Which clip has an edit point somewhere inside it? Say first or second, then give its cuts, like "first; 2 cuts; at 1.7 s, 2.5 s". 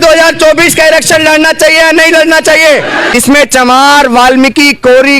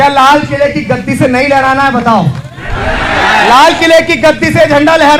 first; 1 cut; at 3.1 s